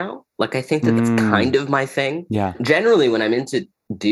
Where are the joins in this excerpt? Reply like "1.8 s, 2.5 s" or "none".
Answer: 1.3 s, 2.6 s

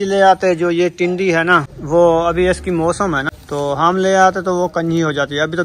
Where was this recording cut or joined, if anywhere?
1.7 s, 3.3 s

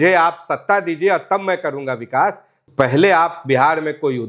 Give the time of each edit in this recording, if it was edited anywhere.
2.5 s

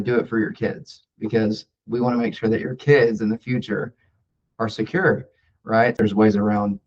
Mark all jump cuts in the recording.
5.9 s

